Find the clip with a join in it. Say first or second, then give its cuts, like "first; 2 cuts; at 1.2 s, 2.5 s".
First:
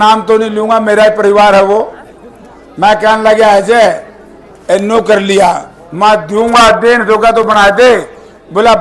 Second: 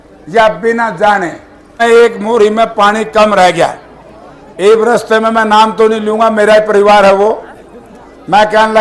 second; 1 cut; at 1.8 s